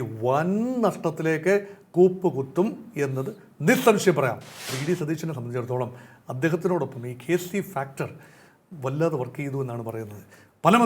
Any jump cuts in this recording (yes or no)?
yes